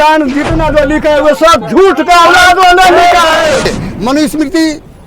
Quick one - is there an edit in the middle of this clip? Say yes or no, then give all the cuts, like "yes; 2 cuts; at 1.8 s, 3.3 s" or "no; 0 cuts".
yes; 1 cut; at 3.7 s